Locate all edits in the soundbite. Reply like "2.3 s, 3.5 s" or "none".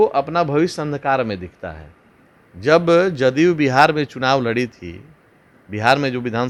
none